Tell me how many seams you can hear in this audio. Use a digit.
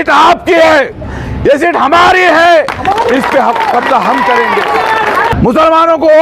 1